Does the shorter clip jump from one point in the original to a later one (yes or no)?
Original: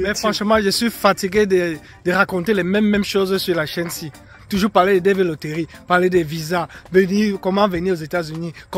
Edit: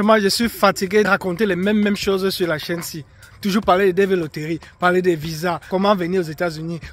yes